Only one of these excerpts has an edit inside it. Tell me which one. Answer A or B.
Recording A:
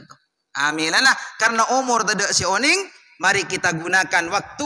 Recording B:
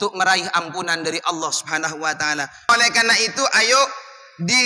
B